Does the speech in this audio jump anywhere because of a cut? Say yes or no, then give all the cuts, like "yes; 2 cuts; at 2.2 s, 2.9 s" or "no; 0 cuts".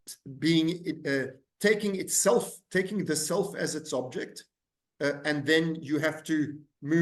no; 0 cuts